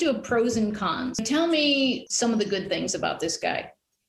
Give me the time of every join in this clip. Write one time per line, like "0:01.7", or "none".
0:01.2
0:02.1